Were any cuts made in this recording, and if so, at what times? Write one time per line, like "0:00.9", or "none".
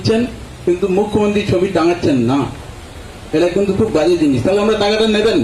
none